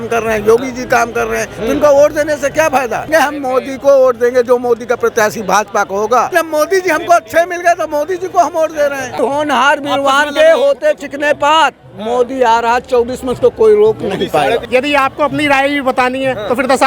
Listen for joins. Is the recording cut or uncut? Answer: cut